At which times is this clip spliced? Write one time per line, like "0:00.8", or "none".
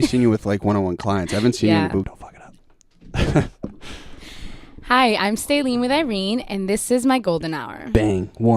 0:02.1